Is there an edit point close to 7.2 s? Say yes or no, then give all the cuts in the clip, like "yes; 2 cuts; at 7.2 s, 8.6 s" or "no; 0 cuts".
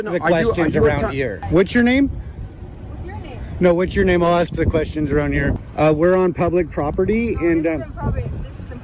no; 2 cuts; at 1.4 s, 5.6 s